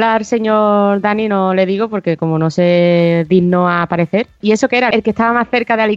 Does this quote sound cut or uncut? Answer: cut